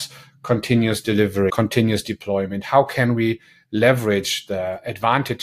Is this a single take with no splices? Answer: no; 1 cut; at 1.5 s

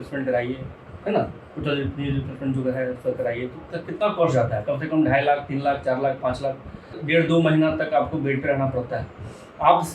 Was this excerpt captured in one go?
no; 1 cut; at 7.0 s

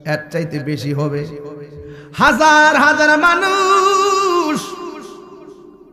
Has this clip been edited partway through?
no; 0 cuts

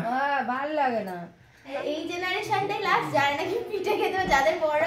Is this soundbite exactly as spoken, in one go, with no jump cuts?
no; 1 cut; at 1.7 s

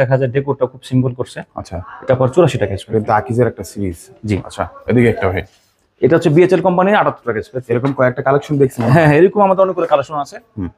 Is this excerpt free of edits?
yes; 0 cuts

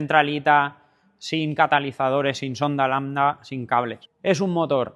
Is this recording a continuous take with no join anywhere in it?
no; 1 cut; at 4.0 s

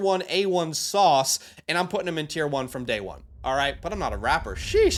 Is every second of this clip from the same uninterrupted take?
yes; 0 cuts

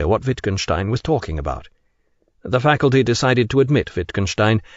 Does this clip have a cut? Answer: yes; 1 cut; at 1.6 s

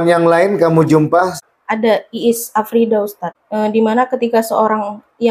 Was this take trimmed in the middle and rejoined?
yes; 2 cuts; at 1.4 s, 3.3 s

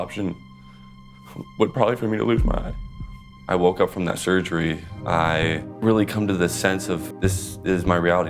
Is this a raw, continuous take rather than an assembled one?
no; 4 cuts; at 3.3 s, 4.9 s, 5.7 s, 7.1 s

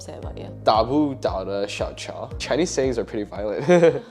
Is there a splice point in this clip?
yes; 1 cut; at 2.3 s

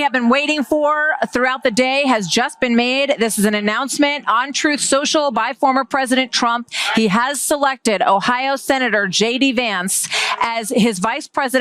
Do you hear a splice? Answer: no; 0 cuts

